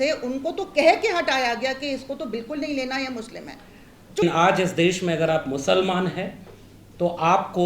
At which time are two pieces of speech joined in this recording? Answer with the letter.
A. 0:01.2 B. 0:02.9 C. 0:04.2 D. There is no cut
C